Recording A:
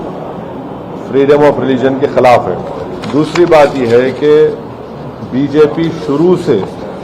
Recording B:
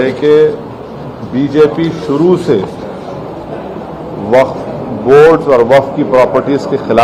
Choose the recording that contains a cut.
A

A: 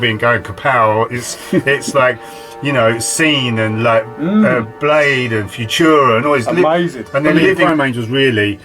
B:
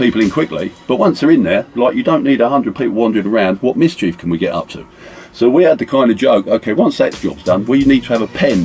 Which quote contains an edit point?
A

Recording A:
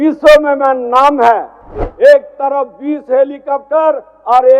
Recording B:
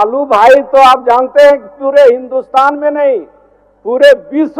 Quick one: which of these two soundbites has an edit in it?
A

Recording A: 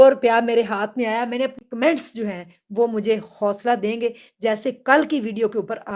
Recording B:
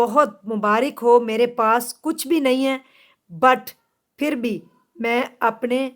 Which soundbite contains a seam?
A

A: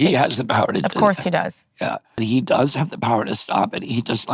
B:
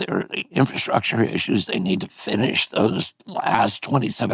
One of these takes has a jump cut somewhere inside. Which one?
A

